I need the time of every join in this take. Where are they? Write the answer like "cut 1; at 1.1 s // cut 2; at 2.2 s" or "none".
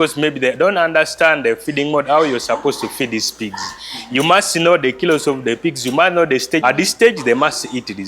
cut 1; at 6.6 s